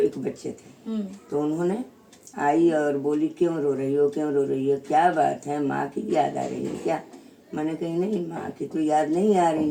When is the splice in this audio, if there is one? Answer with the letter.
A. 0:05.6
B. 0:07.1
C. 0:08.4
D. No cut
D